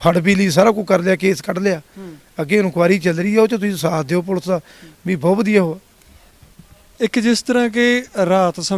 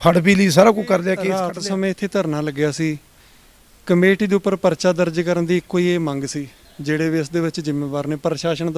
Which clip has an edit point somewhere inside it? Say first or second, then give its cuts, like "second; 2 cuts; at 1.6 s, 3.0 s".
second; 1 cut; at 1.5 s